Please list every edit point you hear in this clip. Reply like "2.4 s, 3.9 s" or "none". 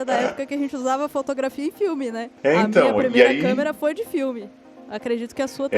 2.3 s